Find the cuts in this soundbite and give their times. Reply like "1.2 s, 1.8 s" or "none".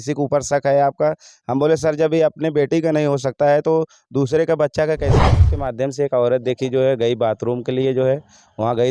5.2 s